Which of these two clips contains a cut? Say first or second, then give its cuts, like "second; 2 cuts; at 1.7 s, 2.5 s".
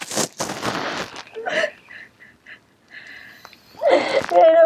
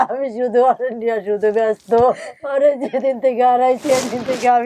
second; 1 cut; at 2.3 s